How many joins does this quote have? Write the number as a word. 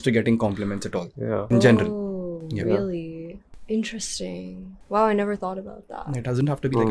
zero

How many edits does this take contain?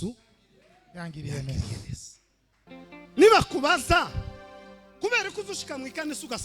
one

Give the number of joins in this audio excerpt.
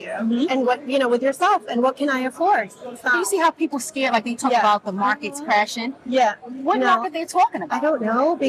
one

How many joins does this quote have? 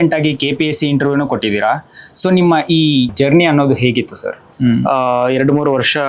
two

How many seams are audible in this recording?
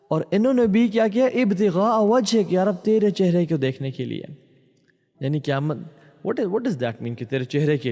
zero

